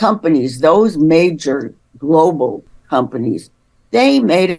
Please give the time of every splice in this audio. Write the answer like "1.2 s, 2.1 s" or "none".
2.7 s